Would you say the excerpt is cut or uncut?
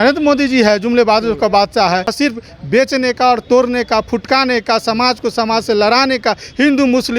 cut